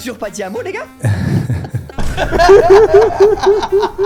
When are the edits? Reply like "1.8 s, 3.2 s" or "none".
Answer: none